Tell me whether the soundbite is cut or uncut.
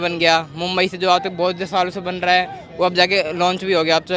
uncut